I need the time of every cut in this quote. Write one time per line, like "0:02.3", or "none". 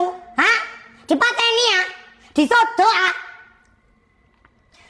none